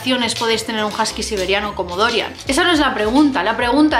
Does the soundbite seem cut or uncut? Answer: cut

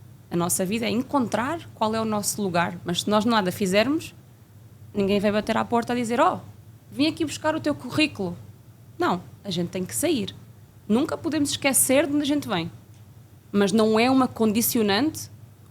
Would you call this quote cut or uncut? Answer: cut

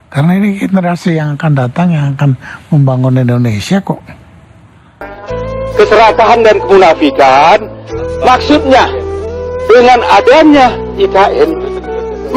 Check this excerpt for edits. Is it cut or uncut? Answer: cut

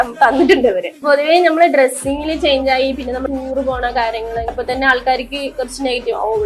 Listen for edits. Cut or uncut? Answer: cut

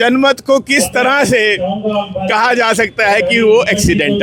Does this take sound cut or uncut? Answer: uncut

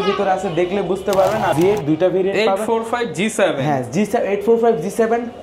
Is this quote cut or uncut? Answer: cut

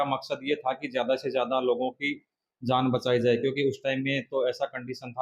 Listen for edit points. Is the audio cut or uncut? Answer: uncut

